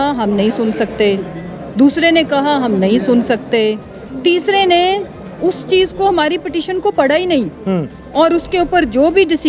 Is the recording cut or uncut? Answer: uncut